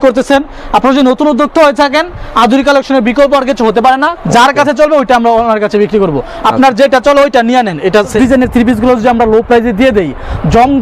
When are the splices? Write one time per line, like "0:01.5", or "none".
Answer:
0:04.2
0:08.1